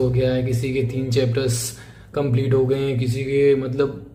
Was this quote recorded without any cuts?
yes; 0 cuts

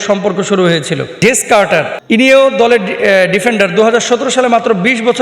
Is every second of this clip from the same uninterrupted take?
no; 2 cuts; at 1.2 s, 2.0 s

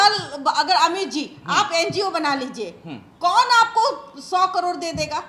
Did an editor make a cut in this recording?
no; 0 cuts

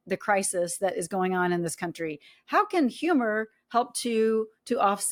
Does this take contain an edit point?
no; 0 cuts

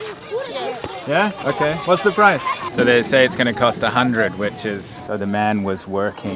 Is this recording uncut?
no; 3 cuts; at 1.4 s, 2.6 s, 4.9 s

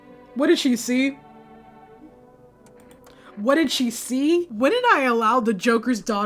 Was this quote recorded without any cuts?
no; 1 cut; at 4.5 s

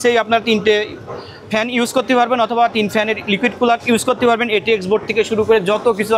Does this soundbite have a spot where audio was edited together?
no; 0 cuts

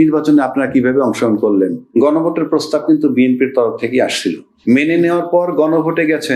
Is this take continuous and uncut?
no; 2 cuts; at 1.8 s, 4.5 s

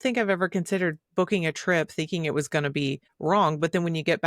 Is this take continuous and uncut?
no; 1 cut; at 3.1 s

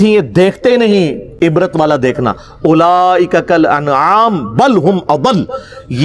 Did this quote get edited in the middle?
no; 0 cuts

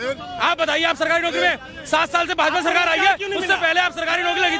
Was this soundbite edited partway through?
no; 0 cuts

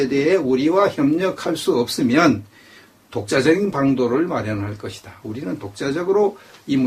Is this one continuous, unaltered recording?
yes; 0 cuts

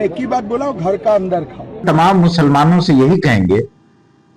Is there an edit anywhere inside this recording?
yes; 1 cut; at 1.8 s

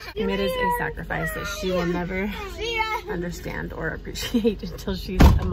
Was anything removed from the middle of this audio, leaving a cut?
no; 0 cuts

